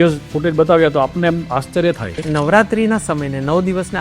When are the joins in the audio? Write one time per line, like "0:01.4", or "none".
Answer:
0:02.1